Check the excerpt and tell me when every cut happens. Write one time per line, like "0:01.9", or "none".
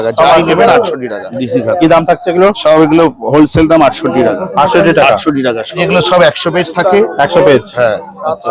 0:01.3
0:05.8